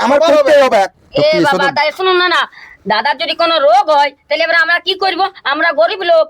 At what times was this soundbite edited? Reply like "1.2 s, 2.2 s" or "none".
1.0 s